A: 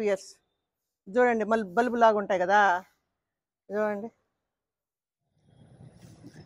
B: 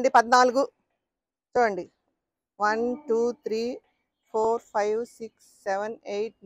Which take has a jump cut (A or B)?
A